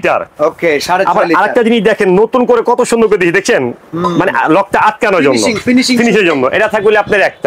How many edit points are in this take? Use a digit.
0